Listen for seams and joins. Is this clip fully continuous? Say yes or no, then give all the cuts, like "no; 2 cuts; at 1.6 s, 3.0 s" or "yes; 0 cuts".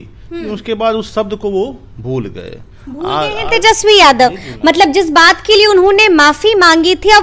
yes; 0 cuts